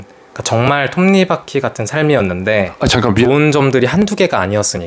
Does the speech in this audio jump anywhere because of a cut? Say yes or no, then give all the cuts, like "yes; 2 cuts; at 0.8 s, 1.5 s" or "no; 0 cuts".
yes; 1 cut; at 3.2 s